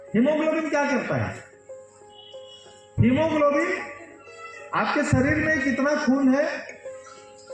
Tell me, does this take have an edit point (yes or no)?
yes